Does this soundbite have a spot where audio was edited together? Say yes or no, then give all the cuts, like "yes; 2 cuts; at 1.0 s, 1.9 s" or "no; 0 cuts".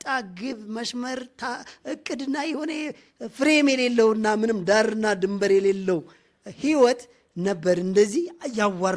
no; 0 cuts